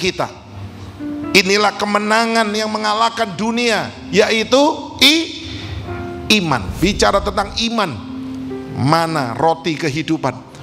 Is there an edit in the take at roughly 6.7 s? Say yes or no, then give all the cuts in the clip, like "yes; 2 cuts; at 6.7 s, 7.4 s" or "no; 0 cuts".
yes; 1 cut; at 6.7 s